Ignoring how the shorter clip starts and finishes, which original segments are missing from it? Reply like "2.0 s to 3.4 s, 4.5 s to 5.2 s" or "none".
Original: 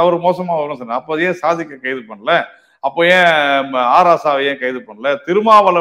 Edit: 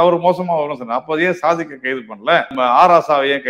2.5 s to 3.7 s